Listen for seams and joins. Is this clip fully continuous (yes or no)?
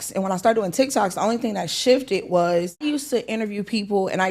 no